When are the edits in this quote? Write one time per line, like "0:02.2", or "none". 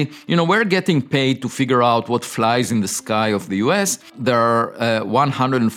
0:04.0